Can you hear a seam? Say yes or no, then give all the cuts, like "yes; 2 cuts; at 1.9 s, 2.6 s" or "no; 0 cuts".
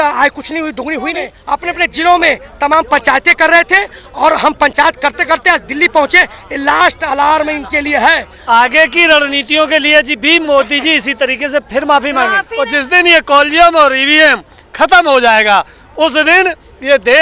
yes; 3 cuts; at 1.4 s, 8.3 s, 12.4 s